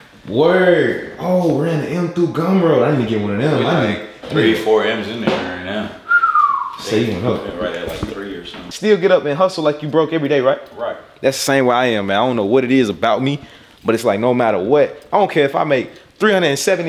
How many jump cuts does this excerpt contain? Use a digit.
0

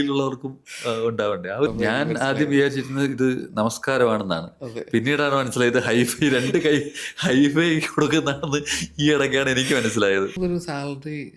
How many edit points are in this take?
2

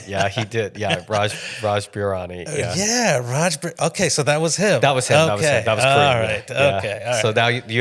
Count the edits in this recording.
0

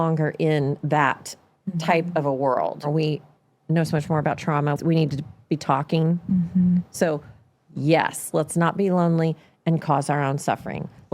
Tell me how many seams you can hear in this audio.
2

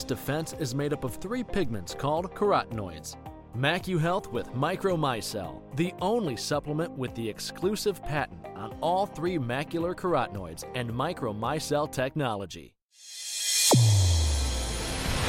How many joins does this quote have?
1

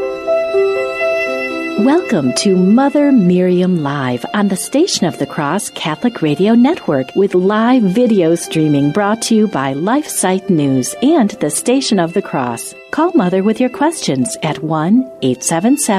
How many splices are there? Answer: 1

